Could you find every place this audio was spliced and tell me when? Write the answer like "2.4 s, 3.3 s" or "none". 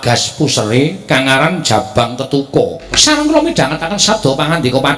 2.8 s